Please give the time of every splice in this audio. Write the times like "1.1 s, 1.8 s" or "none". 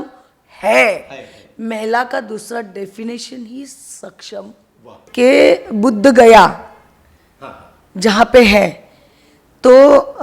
5.1 s